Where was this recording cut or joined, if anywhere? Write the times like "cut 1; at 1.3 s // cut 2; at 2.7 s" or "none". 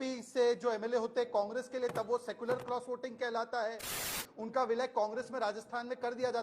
cut 1; at 4.1 s